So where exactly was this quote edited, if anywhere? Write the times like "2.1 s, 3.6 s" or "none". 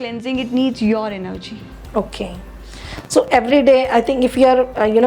none